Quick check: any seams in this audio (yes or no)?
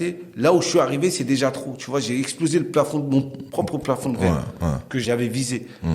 yes